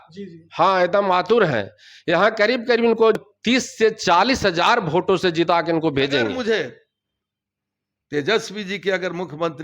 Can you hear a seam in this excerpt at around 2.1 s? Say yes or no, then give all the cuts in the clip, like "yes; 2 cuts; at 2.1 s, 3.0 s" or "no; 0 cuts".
no; 2 cuts; at 3.3 s, 6.3 s